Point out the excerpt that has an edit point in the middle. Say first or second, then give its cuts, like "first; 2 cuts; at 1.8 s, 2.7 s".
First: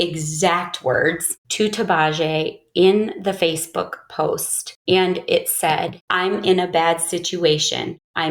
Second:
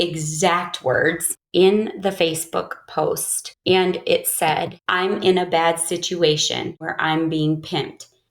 second; 2 cuts; at 1.4 s, 6.9 s